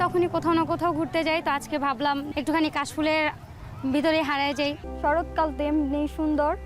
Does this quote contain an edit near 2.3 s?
yes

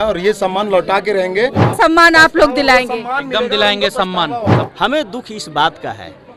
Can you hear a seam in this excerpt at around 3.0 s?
no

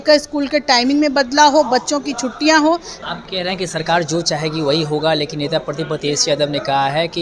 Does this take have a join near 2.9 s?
yes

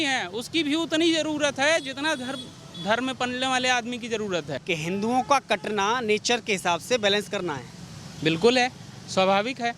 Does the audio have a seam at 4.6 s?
yes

